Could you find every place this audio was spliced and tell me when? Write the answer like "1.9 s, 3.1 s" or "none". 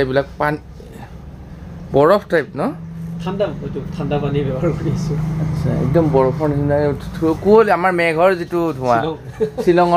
none